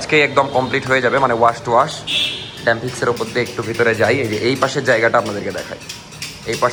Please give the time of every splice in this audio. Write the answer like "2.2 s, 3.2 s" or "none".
none